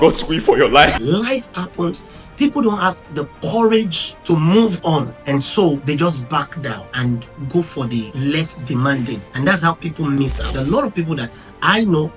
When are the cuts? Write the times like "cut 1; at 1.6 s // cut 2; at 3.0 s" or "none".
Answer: cut 1; at 0.9 s // cut 2; at 4.1 s // cut 3; at 5.1 s // cut 4; at 5.8 s // cut 5; at 6.9 s // cut 6; at 8.1 s // cut 7; at 9.3 s // cut 8; at 10.4 s